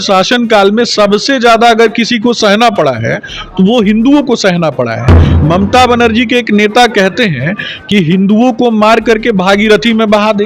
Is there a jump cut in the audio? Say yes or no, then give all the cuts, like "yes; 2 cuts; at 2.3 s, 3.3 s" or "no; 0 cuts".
no; 0 cuts